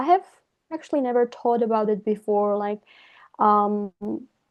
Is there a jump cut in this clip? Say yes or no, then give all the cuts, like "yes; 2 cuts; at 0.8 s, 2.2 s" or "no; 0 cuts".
no; 0 cuts